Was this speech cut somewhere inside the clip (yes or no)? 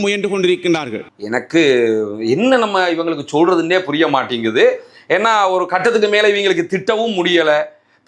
no